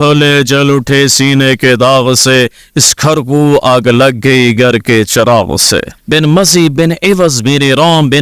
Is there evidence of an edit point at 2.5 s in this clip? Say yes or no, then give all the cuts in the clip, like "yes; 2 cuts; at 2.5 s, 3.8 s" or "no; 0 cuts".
no; 1 cut; at 5.9 s